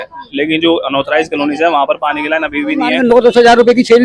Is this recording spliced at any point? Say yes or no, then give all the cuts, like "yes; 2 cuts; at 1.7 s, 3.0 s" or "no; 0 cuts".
yes; 1 cut; at 2.9 s